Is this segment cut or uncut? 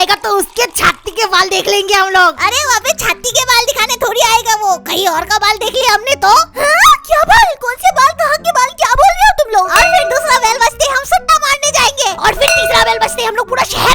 uncut